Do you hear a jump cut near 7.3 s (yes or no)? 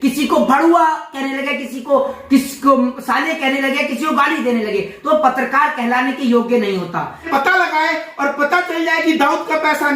yes